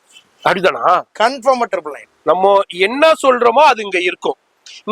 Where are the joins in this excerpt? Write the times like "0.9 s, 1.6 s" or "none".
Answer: 2.1 s